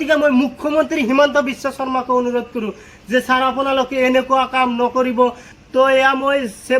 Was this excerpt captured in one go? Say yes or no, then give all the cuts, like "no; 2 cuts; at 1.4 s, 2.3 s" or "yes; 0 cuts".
no; 1 cut; at 5.5 s